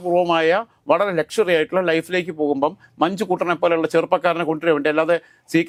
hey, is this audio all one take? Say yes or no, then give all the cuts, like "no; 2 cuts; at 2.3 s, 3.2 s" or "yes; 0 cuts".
yes; 0 cuts